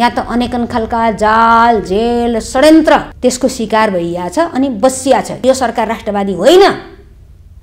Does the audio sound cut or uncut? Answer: cut